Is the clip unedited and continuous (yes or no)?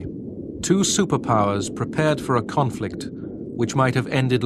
yes